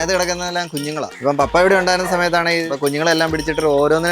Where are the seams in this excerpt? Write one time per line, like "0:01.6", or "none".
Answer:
0:01.1
0:02.7